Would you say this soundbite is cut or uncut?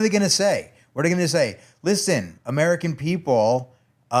uncut